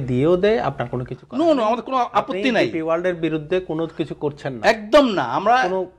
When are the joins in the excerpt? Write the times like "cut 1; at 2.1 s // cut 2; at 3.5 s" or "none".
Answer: none